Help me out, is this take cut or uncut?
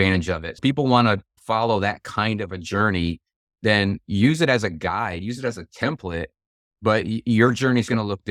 uncut